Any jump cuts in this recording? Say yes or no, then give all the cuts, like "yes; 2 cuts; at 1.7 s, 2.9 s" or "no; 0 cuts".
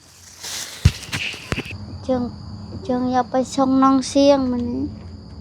yes; 1 cut; at 1.7 s